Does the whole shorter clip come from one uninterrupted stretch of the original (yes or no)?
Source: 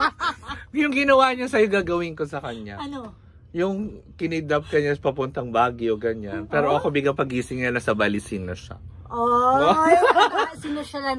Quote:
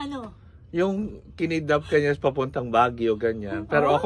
yes